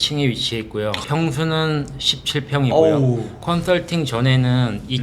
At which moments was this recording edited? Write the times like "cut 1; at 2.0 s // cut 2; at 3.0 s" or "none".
cut 1; at 3.3 s